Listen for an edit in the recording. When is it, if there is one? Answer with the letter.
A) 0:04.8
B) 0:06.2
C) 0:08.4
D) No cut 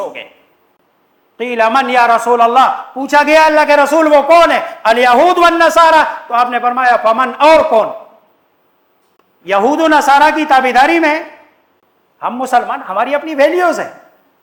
D